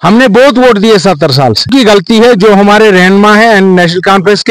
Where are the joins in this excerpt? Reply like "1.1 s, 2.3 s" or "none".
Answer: 1.7 s